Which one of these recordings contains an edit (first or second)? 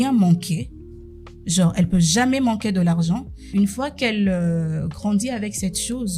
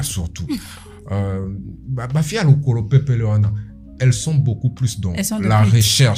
first